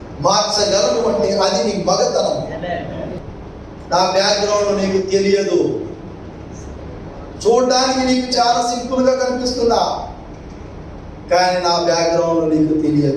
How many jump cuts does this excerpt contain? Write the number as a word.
one